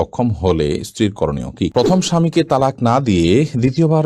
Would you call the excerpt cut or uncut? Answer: cut